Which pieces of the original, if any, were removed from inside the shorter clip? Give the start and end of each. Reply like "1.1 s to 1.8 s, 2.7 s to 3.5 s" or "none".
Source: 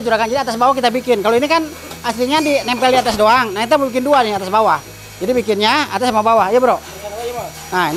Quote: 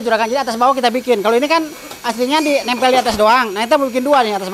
none